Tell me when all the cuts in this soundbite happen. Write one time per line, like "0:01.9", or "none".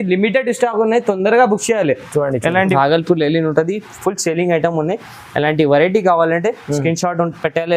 0:02.7